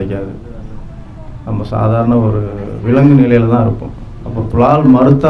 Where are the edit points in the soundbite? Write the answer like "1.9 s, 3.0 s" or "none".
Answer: none